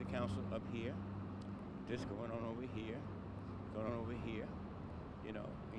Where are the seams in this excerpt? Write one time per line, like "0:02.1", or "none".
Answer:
0:02.1